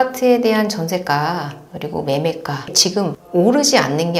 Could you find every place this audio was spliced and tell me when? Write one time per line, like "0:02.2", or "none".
0:02.8